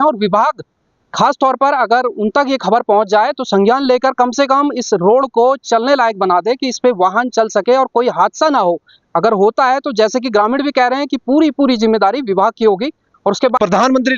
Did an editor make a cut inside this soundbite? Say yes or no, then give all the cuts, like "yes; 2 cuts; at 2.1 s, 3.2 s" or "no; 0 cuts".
no; 0 cuts